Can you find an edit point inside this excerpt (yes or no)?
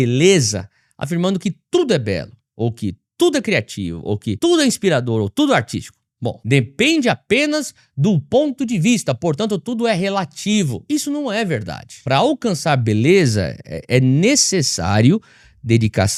no